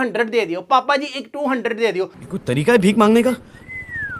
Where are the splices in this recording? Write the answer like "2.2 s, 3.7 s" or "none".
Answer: none